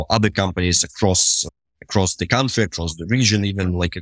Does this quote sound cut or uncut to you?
uncut